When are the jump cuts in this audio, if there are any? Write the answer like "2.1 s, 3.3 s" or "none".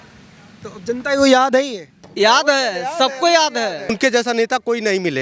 3.9 s